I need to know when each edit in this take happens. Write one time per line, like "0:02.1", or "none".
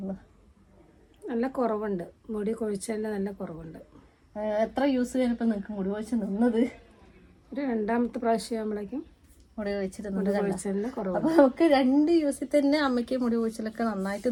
none